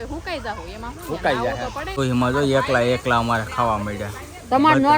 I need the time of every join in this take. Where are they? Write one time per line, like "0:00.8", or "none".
0:02.0